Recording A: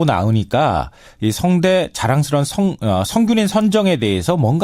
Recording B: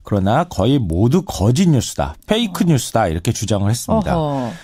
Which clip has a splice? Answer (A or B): A